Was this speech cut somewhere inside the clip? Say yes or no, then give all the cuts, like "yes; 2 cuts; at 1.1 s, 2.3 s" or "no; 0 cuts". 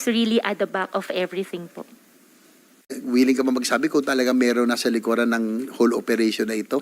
yes; 1 cut; at 3.0 s